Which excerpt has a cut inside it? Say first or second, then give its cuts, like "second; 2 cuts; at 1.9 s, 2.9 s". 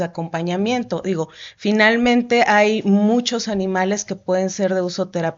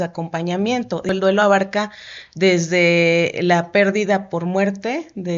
second; 1 cut; at 1.1 s